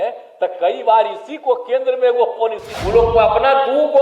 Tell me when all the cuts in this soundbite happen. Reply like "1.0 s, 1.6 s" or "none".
2.7 s